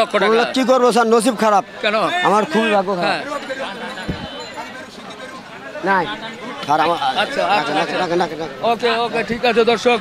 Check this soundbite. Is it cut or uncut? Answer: uncut